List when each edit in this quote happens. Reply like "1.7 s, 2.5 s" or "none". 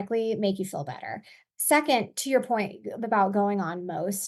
1.4 s